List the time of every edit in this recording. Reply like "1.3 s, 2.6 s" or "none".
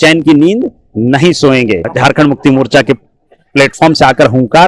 1.9 s